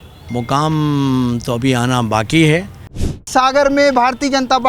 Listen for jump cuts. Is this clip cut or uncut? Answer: cut